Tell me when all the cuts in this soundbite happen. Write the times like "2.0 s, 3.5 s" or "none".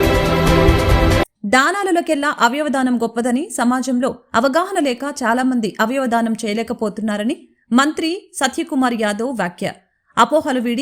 1.3 s